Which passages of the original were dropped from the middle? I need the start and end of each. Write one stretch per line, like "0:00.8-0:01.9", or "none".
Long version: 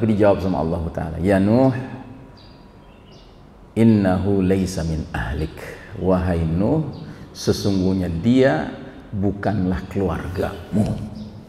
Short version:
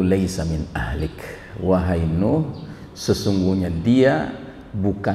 none